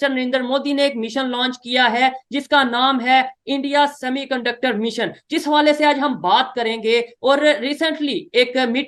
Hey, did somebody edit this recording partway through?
no; 0 cuts

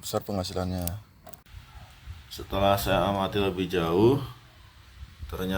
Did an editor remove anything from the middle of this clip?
yes; 1 cut; at 1.5 s

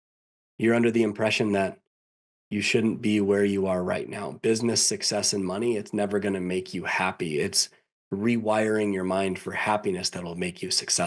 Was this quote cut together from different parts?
no; 0 cuts

